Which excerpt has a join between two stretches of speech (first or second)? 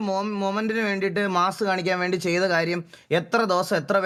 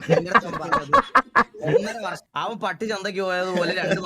second